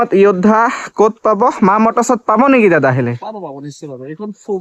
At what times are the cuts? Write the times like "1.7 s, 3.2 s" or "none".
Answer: none